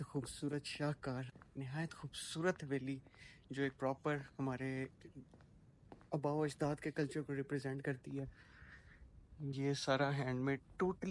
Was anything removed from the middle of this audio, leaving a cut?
no; 0 cuts

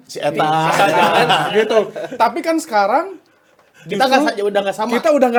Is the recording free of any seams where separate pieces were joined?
yes; 0 cuts

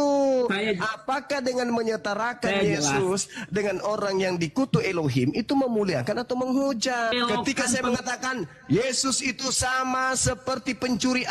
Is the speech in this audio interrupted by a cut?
yes; 1 cut; at 7.1 s

